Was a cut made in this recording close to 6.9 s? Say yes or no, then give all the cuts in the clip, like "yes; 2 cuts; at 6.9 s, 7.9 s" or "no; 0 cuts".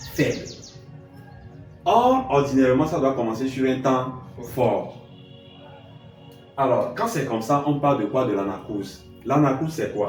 no; 0 cuts